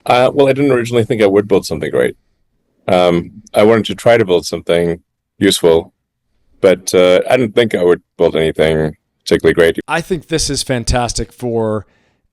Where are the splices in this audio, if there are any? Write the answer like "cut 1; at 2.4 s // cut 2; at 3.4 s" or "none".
cut 1; at 9.8 s